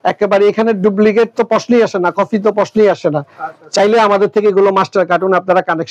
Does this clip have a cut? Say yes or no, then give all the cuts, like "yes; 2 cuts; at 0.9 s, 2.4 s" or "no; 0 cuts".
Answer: no; 0 cuts